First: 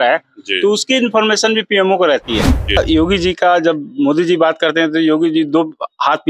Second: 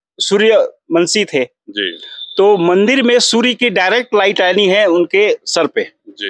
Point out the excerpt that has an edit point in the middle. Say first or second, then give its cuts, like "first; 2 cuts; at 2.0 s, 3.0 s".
first; 1 cut; at 2.8 s